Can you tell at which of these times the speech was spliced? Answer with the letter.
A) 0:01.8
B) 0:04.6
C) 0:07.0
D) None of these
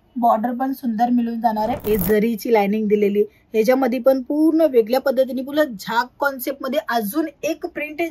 A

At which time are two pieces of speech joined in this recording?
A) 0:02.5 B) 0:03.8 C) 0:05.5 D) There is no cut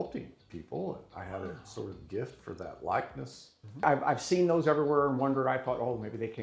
B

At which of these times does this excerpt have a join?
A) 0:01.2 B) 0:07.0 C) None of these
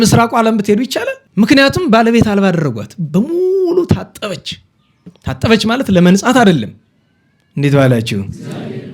A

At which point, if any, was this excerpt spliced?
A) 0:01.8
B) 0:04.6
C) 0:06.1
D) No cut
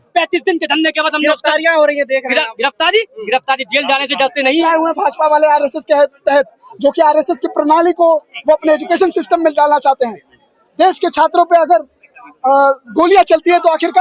B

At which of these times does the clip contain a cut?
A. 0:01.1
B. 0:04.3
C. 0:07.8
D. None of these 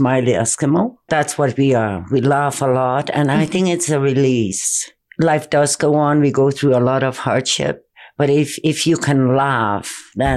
A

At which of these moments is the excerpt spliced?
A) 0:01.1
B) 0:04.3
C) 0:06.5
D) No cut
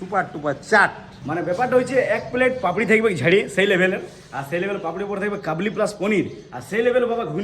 A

